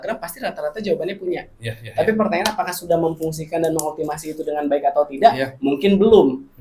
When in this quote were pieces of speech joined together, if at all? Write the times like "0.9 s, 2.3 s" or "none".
none